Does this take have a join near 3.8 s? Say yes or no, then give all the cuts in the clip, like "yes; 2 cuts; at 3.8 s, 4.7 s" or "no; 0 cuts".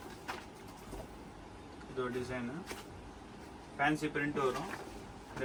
no; 0 cuts